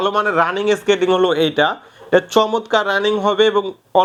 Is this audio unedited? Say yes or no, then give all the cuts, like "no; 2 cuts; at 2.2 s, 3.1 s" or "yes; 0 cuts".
yes; 0 cuts